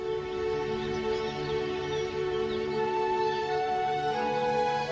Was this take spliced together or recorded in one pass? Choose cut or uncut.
uncut